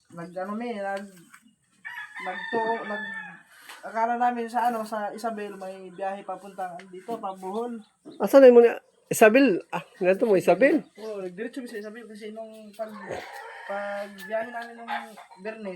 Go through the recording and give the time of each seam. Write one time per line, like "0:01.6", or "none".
none